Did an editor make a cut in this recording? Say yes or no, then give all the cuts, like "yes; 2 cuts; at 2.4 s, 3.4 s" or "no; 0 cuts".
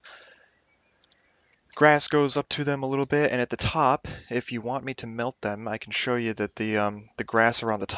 yes; 1 cut; at 3.7 s